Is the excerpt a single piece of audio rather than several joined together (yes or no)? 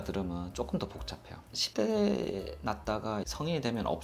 yes